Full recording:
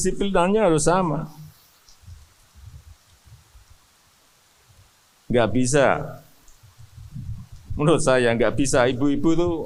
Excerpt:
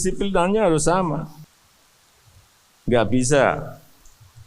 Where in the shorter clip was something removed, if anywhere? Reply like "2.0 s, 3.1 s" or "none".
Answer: 1.5 s